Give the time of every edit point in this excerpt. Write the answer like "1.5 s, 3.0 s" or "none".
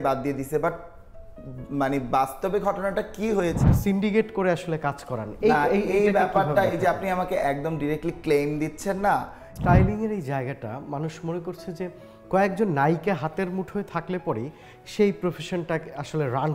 3.6 s, 9.5 s